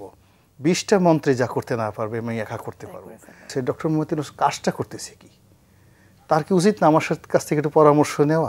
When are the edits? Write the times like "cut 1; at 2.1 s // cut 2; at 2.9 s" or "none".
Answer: cut 1; at 3.5 s